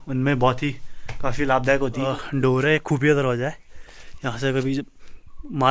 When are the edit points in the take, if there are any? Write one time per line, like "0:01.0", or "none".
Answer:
0:02.0